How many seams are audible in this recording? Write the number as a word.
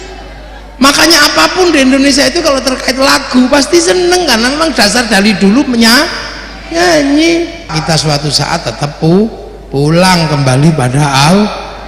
one